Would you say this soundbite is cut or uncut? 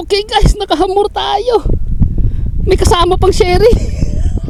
uncut